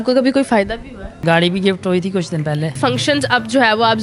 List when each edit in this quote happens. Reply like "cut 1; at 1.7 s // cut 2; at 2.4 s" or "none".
cut 1; at 1.2 s // cut 2; at 2.8 s